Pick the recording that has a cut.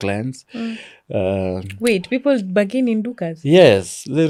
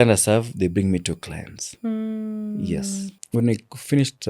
second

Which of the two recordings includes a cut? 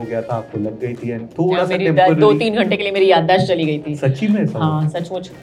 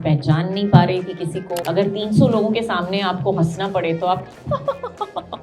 second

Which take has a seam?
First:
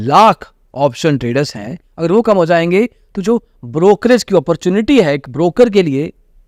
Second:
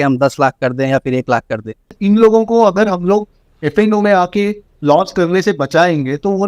second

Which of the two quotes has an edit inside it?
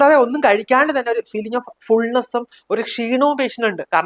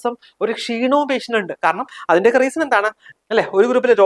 second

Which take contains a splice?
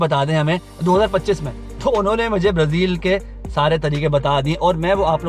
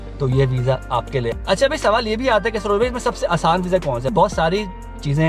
second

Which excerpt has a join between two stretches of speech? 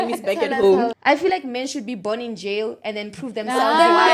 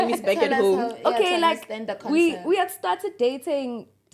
first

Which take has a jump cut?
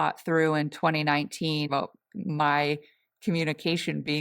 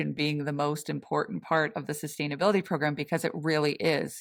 first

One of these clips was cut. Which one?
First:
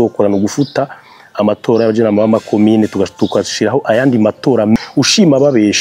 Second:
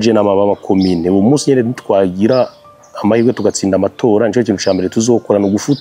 first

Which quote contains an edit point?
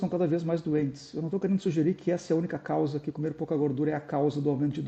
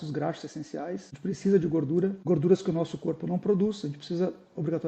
second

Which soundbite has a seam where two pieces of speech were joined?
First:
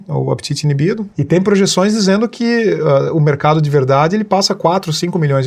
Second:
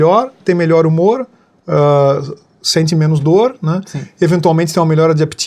first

